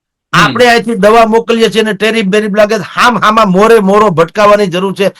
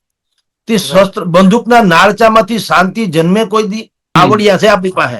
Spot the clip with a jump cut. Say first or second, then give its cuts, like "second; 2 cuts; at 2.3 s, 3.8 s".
second; 1 cut; at 4.2 s